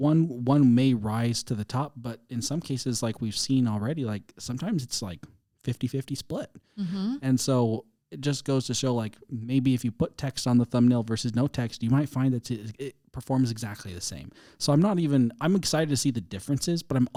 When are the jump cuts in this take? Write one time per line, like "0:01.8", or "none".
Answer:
none